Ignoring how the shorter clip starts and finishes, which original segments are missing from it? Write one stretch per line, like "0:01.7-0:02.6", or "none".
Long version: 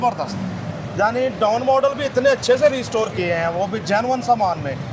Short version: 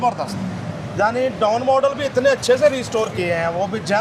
none